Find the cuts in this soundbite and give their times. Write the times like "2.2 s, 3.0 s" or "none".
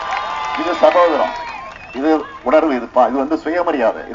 none